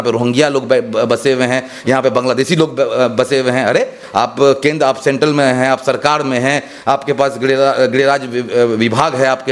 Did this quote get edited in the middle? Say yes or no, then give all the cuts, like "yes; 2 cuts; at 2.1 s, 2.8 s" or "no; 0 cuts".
no; 0 cuts